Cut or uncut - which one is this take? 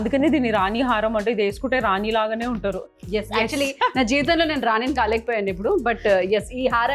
uncut